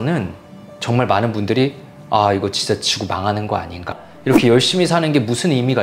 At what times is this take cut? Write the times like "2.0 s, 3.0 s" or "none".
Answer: 3.9 s